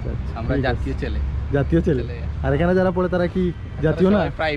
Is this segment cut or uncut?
uncut